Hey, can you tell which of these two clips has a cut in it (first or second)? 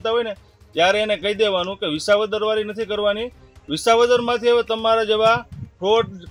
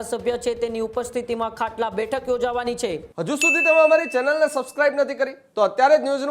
second